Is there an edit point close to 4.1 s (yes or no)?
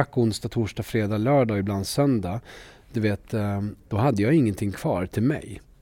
no